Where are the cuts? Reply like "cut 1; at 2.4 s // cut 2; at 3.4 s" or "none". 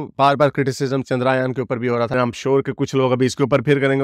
none